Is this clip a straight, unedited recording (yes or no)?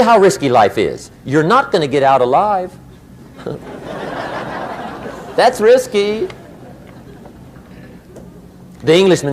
yes